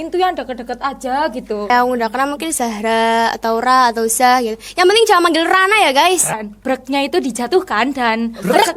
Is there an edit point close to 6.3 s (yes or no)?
yes